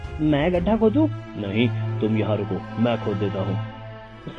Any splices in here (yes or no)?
yes